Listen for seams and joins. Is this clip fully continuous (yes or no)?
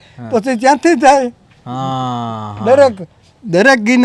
yes